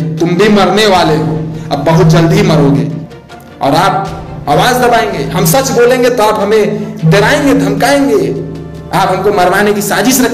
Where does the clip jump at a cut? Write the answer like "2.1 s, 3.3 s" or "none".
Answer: 3.0 s